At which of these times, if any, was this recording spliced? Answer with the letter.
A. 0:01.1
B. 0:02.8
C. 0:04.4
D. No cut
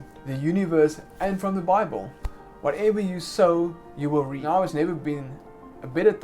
C